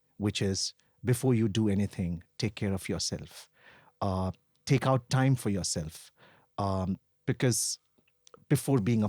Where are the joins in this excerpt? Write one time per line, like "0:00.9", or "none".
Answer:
none